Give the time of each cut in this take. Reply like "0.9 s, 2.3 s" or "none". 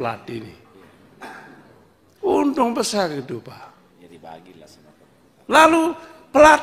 none